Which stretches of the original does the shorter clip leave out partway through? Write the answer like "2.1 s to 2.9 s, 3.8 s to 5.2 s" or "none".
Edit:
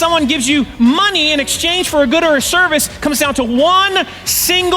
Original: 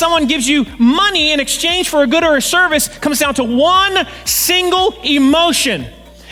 none